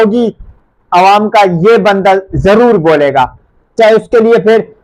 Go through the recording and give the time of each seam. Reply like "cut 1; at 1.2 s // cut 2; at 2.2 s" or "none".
none